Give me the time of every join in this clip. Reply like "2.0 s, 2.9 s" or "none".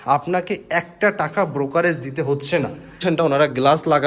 3.0 s